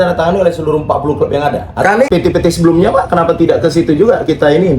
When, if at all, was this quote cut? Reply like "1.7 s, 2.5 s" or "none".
2.1 s